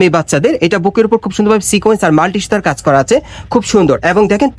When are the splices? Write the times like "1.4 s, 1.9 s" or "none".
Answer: none